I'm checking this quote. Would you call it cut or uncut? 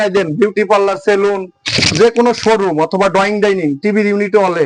uncut